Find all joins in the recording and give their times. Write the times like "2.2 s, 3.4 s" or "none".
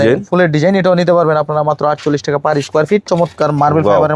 3.0 s